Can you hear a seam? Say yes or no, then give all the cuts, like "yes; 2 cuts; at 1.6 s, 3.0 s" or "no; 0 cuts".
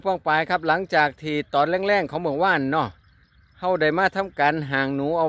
no; 0 cuts